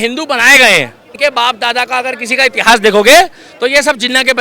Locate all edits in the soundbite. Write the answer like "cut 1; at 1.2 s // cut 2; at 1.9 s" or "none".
cut 1; at 1.3 s

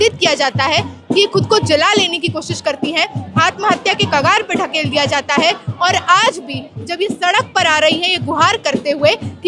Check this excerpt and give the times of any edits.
none

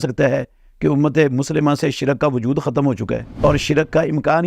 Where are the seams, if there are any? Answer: cut 1; at 3.3 s

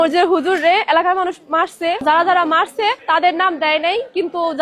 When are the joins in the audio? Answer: cut 1; at 2.0 s // cut 2; at 3.0 s

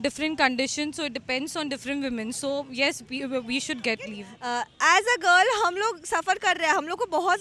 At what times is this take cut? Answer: cut 1; at 4.3 s

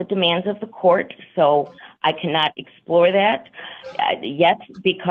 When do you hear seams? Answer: none

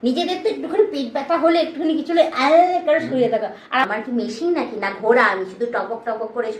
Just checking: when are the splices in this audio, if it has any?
cut 1; at 3.9 s

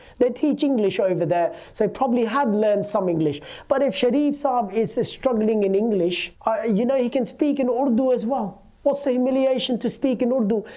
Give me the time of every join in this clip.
none

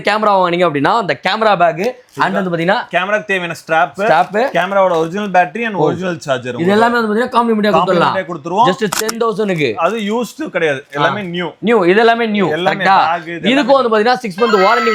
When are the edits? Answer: none

